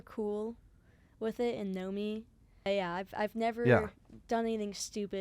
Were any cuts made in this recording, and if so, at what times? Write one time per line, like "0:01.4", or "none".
0:02.7

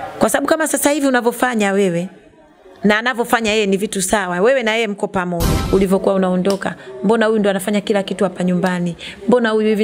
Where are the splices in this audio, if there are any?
0:05.6

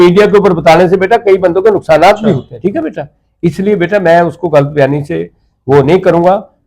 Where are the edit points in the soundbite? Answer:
0:02.5

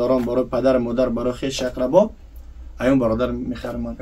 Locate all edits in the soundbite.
none

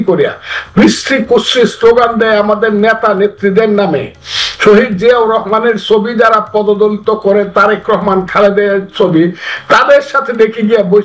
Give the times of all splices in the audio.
none

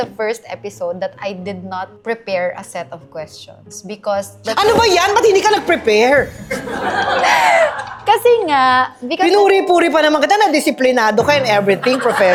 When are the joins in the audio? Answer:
none

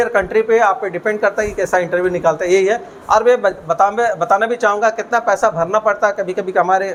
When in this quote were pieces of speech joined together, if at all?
none

